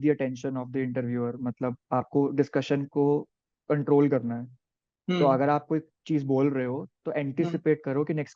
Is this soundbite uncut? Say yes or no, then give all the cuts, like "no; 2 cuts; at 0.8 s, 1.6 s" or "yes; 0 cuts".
yes; 0 cuts